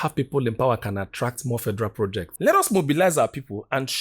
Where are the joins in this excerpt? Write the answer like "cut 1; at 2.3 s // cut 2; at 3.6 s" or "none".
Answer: cut 1; at 2.3 s